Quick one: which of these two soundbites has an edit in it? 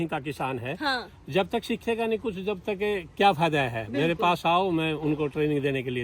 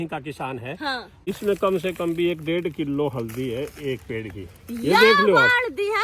second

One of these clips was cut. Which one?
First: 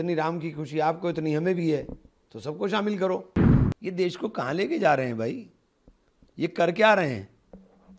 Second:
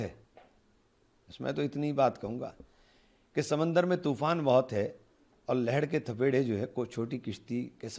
first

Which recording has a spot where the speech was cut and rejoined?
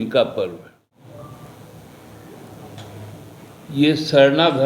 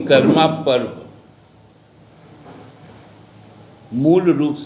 first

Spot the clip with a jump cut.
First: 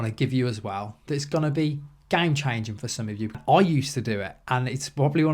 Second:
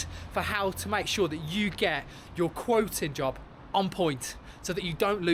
first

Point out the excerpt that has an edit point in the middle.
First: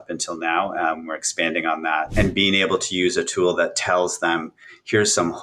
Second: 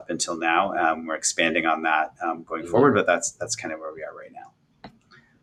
first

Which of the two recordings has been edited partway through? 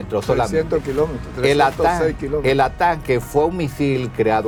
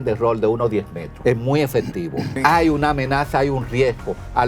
second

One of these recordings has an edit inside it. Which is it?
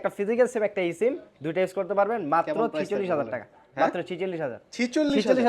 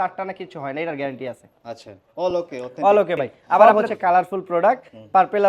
second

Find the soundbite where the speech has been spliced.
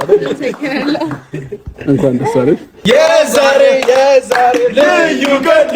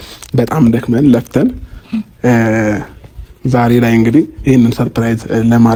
first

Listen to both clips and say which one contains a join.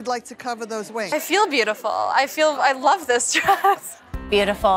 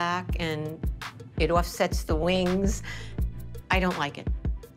first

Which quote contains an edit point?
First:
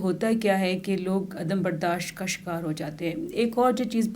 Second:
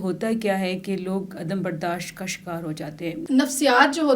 second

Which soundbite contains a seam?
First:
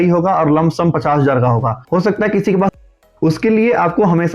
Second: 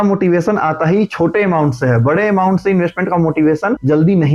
first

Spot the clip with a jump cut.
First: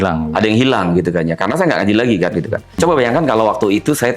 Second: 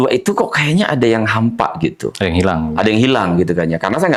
first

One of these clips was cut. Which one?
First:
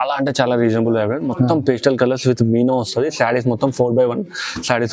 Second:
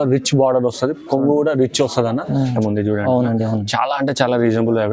second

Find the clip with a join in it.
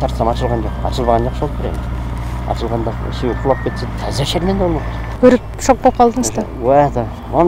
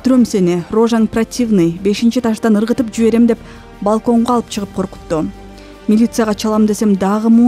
first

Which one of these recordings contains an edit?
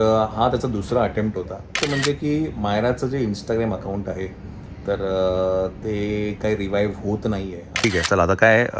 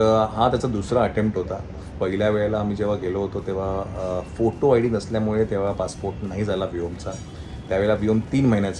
first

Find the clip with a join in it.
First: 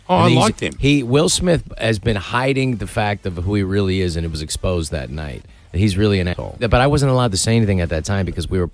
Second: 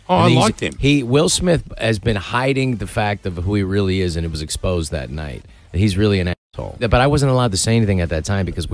first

